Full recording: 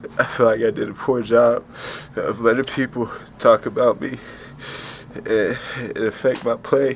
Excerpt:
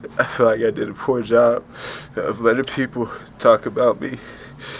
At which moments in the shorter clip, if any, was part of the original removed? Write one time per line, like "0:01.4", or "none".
none